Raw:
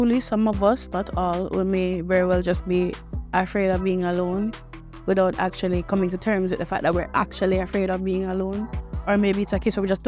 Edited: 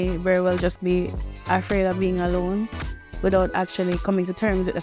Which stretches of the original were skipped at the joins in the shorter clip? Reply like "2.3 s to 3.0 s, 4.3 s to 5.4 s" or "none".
none